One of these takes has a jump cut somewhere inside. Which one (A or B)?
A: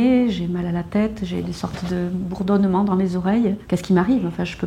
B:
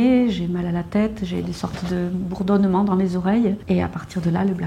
B